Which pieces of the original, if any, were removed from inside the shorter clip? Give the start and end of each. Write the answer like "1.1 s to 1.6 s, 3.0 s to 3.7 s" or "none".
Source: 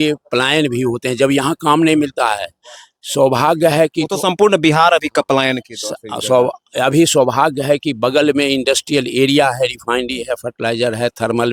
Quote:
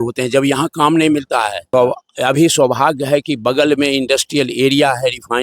2.5 s to 6.2 s